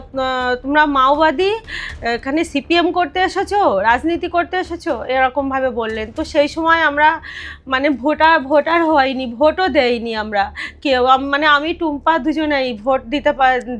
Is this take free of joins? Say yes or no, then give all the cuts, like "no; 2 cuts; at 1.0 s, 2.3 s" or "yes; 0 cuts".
yes; 0 cuts